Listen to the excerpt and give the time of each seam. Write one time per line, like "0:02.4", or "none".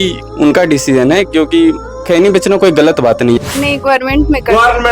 0:03.4